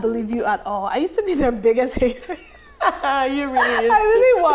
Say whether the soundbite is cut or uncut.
uncut